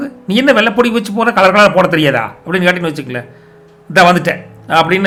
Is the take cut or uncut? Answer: uncut